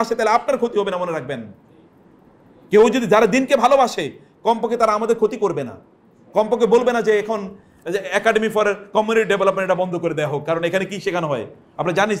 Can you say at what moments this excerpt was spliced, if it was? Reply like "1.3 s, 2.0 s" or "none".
none